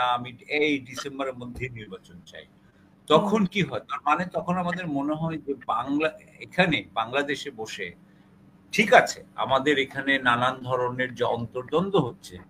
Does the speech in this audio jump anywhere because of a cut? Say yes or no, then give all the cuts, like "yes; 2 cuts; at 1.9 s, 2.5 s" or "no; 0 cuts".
no; 0 cuts